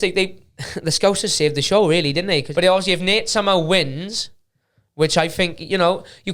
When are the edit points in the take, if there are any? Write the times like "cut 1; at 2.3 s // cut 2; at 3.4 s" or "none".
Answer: cut 1; at 2.5 s